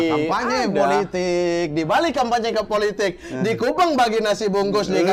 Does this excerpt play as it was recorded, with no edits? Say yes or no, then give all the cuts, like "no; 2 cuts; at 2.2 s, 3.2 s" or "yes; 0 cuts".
yes; 0 cuts